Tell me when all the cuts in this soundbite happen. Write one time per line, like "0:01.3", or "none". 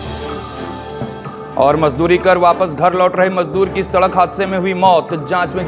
none